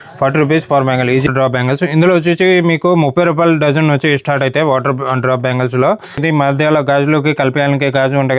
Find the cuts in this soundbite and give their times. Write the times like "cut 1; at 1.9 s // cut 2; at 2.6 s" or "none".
cut 1; at 1.3 s // cut 2; at 6.2 s